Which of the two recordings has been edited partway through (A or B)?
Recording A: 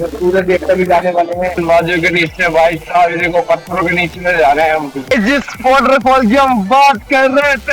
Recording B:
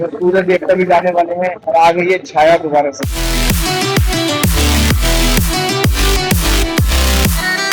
A